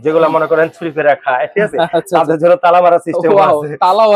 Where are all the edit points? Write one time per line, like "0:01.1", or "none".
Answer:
none